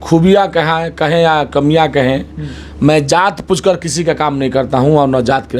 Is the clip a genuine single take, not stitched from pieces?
yes; 0 cuts

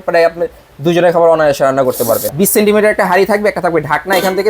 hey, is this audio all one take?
no; 1 cut; at 2.3 s

